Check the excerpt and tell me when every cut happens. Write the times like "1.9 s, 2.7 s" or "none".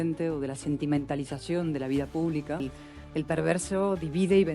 2.6 s